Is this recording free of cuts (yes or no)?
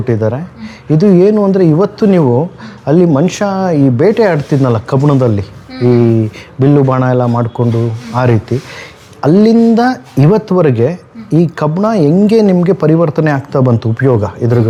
yes